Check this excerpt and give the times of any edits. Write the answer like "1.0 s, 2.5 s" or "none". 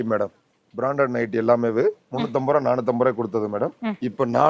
none